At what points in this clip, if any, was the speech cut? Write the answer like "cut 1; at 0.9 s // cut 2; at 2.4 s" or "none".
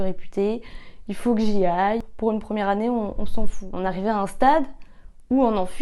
cut 1; at 2.0 s // cut 2; at 3.6 s